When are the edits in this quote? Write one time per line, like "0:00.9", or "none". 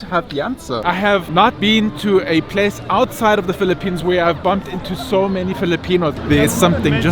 0:00.8
0:06.1